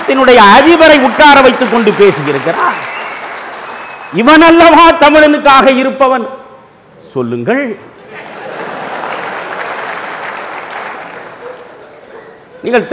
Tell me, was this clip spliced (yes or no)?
no